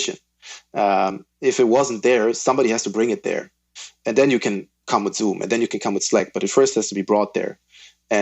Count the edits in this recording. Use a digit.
1